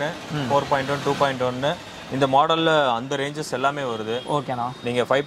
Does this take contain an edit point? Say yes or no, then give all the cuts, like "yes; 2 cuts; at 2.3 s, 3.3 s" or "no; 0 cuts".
no; 0 cuts